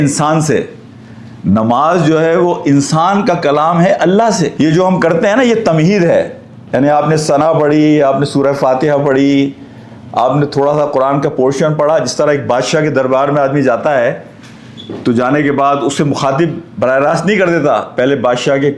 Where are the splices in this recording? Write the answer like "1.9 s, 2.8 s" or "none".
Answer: none